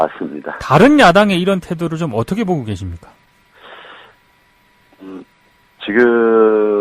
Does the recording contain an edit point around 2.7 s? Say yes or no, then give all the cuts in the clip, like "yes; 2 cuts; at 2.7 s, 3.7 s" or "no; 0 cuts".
yes; 1 cut; at 2.7 s